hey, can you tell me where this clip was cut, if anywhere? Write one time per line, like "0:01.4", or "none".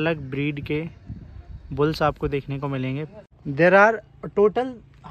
0:03.3